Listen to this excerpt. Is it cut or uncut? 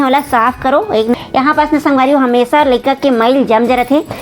cut